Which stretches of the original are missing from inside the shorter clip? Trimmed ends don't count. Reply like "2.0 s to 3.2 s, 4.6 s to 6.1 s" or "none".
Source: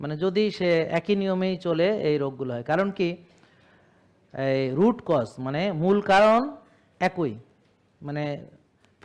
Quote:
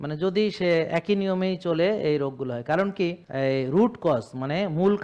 3.2 s to 4.3 s